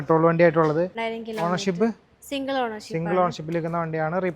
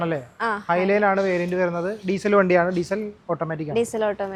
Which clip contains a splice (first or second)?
first